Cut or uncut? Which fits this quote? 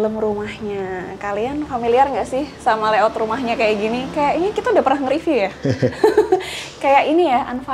uncut